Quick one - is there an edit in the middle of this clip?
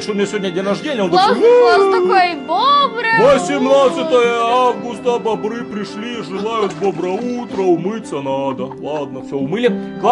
no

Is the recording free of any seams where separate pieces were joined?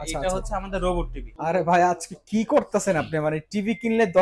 no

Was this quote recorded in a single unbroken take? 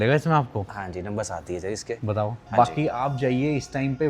no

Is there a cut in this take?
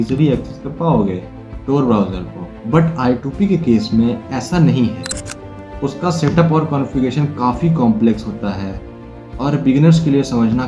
no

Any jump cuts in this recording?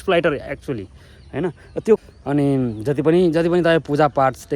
yes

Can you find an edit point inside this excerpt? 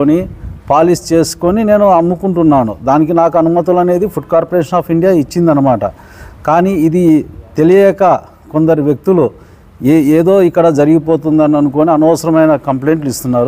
no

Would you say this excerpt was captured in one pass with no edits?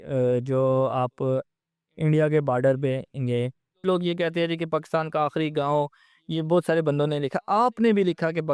no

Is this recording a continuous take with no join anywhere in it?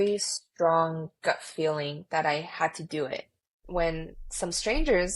no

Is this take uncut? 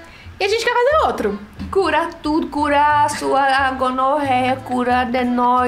no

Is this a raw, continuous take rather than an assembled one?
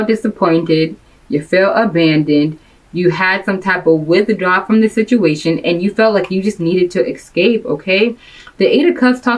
yes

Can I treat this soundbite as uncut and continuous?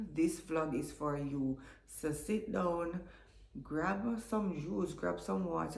yes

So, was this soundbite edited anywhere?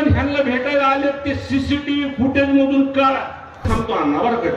yes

